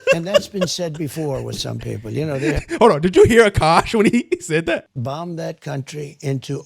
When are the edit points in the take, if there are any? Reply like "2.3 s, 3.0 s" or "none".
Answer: 4.9 s